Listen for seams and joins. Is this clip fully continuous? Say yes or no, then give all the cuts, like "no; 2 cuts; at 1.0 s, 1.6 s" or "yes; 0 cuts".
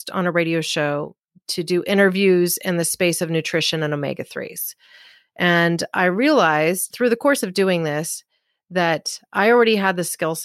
no; 1 cut; at 6.9 s